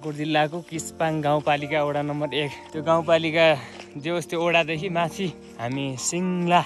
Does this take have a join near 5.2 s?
no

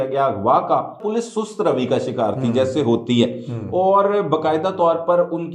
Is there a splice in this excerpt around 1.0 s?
yes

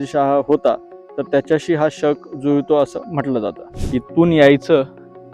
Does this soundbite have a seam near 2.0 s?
no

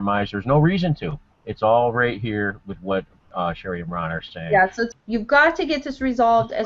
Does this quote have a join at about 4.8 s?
yes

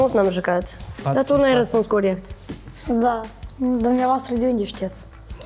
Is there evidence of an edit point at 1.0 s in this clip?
yes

